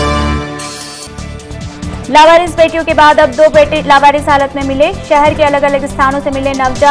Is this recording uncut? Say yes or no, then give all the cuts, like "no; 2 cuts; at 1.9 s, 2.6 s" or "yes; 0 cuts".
no; 1 cut; at 0.9 s